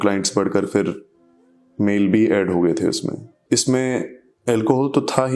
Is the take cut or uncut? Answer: cut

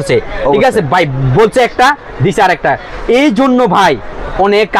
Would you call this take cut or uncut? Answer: uncut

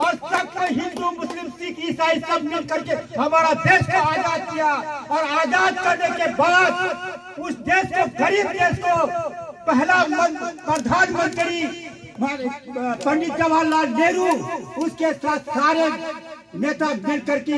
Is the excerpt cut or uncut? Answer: uncut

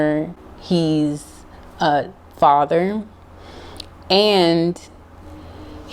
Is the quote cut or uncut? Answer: uncut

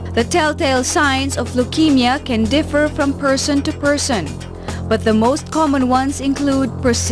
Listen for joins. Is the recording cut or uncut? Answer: uncut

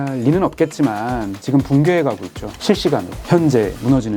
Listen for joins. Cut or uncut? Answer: cut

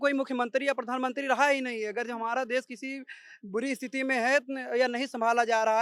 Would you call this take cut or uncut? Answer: uncut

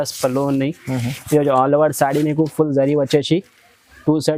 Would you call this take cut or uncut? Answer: uncut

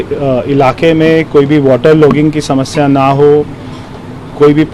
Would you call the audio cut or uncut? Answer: uncut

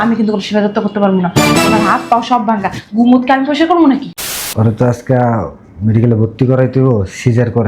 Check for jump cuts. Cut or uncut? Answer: cut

